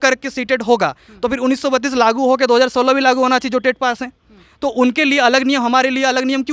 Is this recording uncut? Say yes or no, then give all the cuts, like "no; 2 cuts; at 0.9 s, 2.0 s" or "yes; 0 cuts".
yes; 0 cuts